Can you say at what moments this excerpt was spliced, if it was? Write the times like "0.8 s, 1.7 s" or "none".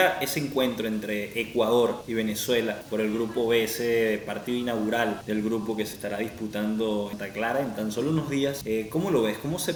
none